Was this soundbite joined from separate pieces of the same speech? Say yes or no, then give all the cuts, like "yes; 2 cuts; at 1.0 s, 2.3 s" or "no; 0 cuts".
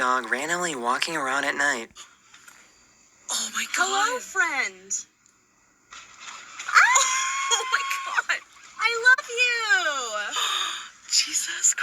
yes; 2 cuts; at 3.5 s, 10.6 s